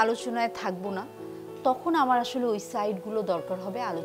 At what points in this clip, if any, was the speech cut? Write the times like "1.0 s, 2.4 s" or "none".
none

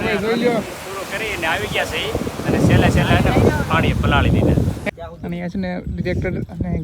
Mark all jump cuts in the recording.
4.8 s

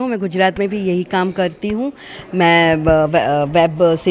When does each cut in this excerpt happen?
none

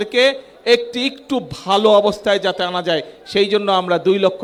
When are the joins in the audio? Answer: none

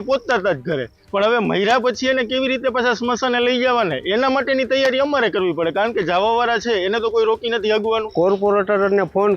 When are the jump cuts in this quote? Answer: 8.1 s

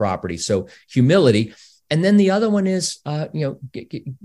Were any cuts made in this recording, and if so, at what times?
none

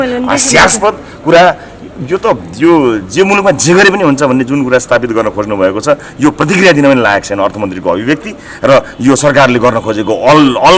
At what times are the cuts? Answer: none

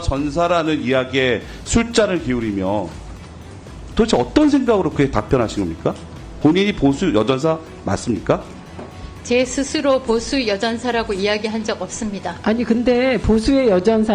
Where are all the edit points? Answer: 12.4 s

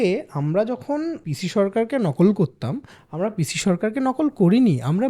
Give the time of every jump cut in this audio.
1.3 s

